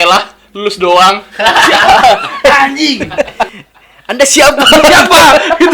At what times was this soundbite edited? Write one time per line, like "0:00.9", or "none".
0:03.5

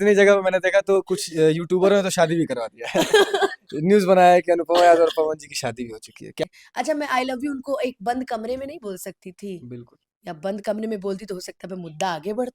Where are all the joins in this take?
0:06.4

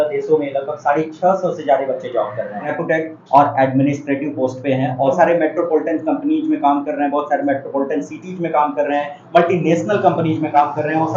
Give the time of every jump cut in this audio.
0:02.7
0:05.2

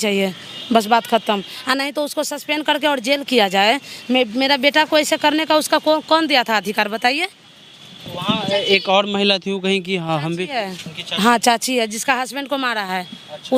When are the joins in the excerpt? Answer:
none

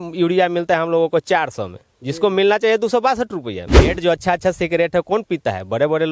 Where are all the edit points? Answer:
0:03.9

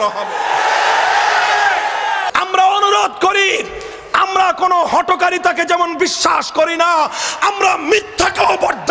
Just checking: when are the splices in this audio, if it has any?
0:02.2

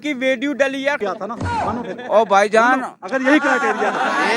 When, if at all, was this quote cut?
0:01.0

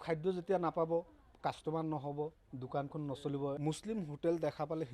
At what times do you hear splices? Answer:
0:03.6

